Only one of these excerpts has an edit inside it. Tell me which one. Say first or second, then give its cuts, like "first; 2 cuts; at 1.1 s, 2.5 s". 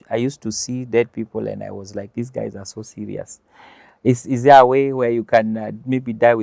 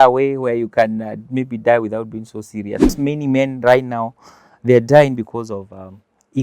second; 1 cut; at 2.9 s